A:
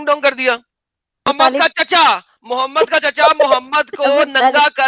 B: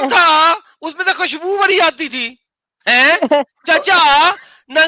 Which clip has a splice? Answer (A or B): A